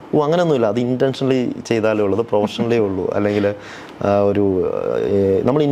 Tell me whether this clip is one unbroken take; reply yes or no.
yes